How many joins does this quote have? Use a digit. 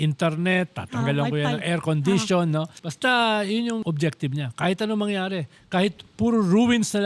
2